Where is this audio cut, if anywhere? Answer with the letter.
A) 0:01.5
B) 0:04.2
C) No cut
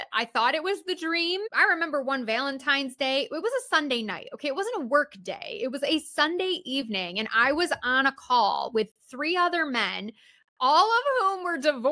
A